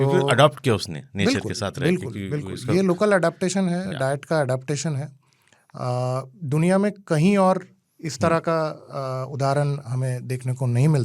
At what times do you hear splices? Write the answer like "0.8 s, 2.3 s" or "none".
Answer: none